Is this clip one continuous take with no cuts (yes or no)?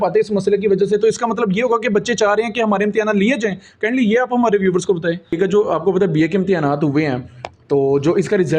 no